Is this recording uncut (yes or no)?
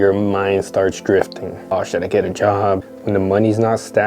no